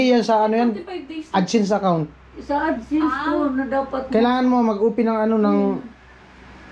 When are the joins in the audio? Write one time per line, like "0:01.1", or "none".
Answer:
none